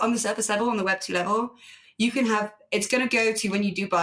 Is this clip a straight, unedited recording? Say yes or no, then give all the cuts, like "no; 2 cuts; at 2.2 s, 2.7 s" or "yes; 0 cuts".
yes; 0 cuts